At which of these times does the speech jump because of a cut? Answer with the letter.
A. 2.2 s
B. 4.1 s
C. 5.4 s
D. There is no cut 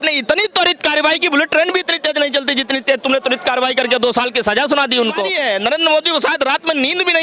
C